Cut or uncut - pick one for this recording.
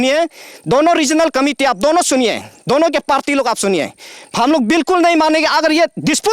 uncut